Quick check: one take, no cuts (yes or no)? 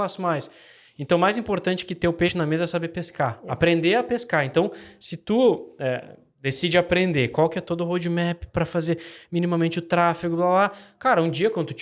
yes